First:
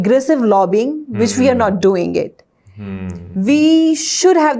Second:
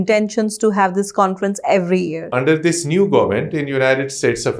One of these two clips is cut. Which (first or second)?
second